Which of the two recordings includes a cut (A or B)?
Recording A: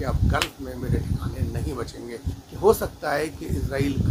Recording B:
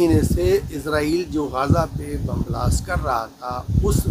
A